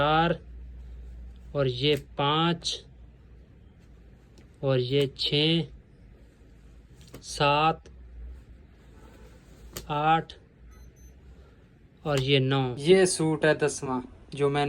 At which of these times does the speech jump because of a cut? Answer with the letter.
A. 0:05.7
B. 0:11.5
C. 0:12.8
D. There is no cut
C